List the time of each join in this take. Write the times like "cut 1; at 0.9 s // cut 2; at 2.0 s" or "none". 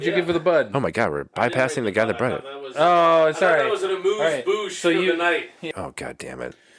cut 1; at 5.7 s